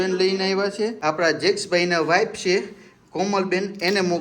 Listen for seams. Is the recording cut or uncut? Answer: cut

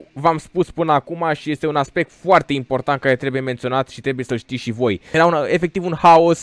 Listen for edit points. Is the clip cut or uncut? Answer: cut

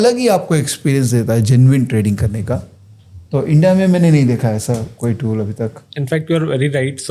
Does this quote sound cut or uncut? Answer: uncut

